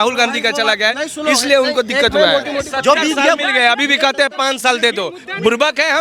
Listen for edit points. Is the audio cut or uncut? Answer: cut